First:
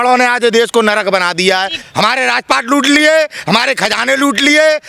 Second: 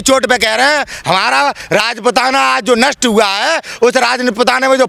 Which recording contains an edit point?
first; 1 cut; at 1.8 s

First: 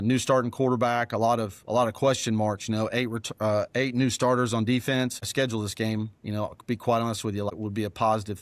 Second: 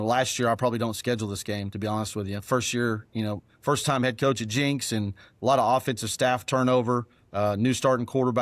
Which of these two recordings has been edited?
first; 2 cuts; at 5.2 s, 7.5 s

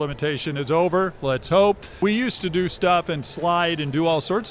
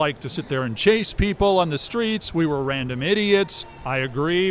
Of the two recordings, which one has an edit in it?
first; 1 cut; at 2.0 s

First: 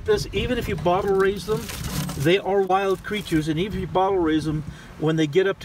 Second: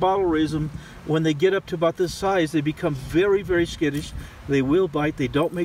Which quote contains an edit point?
first; 1 cut; at 2.7 s

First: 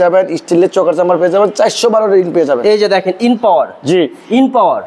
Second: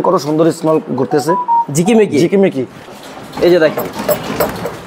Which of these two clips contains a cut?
second; 1 cut; at 2.9 s

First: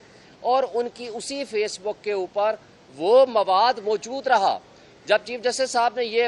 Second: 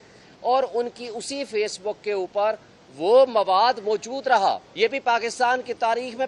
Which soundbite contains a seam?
second; 1 cut; at 5.0 s

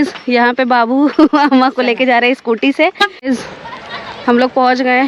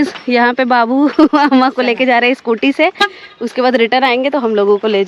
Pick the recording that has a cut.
first; 1 cut; at 3.2 s

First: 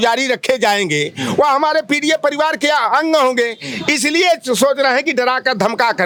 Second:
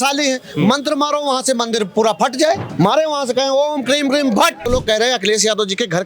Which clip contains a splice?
second; 2 cuts; at 2.7 s, 4.6 s

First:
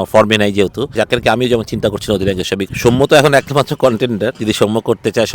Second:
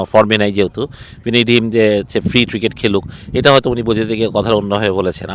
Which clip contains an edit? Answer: first; 2 cuts; at 0.9 s, 2.7 s

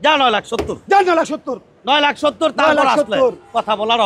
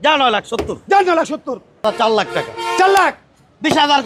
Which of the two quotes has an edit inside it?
second; 1 cut; at 1.8 s

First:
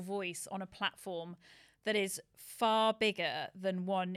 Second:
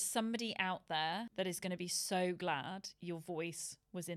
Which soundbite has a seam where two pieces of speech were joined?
second; 1 cut; at 1.3 s

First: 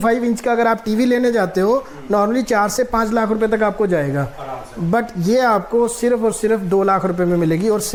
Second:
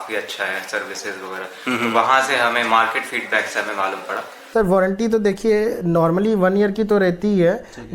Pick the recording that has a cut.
second; 1 cut; at 4.4 s

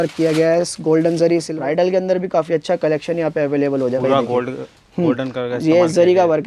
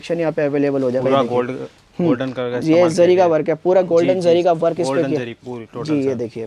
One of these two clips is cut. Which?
first; 1 cut; at 1.5 s

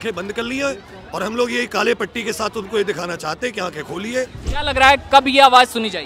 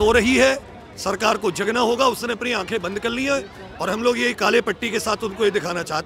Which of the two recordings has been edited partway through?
first; 1 cut; at 4.4 s

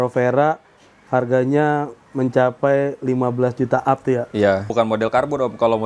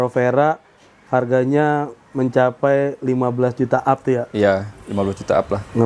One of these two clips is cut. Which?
first; 1 cut; at 4.7 s

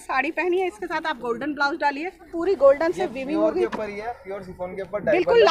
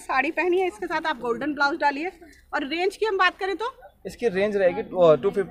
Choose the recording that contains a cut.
first; 1 cut; at 2.3 s

